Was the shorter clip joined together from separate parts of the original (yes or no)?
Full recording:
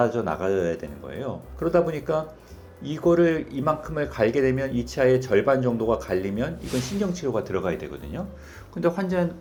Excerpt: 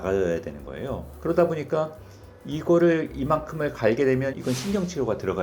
yes